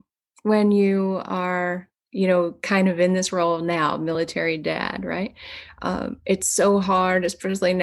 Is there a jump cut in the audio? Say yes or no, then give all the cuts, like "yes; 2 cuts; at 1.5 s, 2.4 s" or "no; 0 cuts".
no; 0 cuts